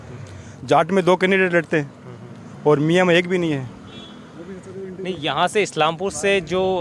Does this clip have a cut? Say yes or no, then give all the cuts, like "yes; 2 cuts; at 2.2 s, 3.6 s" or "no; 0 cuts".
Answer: no; 0 cuts